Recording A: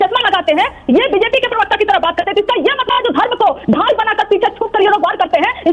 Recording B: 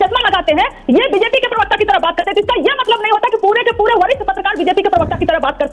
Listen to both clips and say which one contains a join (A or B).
A